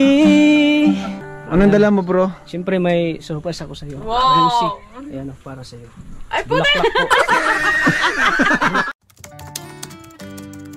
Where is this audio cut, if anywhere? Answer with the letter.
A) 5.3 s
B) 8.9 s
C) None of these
B